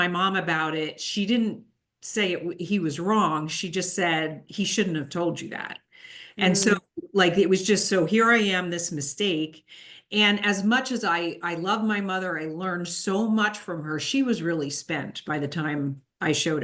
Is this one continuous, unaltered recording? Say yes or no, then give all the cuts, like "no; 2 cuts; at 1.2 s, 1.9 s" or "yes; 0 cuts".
yes; 0 cuts